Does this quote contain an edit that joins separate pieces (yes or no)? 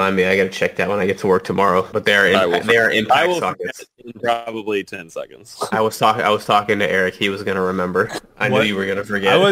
yes